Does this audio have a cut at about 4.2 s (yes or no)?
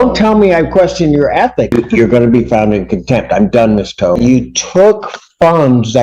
yes